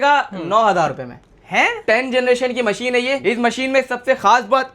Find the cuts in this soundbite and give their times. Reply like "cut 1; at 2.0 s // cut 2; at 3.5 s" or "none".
cut 1; at 1.8 s // cut 2; at 3.2 s